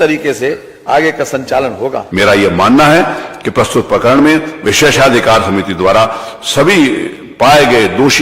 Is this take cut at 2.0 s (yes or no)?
yes